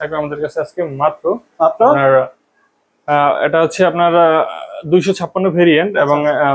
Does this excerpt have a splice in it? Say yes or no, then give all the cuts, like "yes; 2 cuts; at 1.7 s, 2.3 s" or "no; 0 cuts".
no; 0 cuts